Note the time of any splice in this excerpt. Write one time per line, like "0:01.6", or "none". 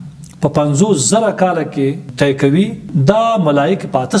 0:02.1
0:02.9